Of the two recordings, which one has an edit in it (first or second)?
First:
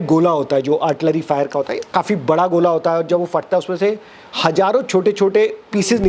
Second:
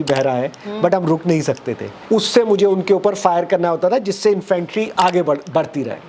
second